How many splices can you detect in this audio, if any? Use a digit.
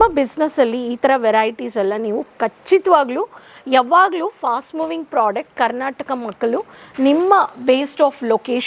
0